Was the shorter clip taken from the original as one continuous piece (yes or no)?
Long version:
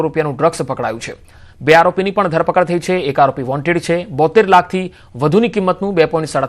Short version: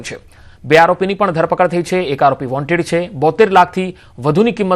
yes